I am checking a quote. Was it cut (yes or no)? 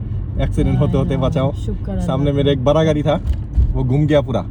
no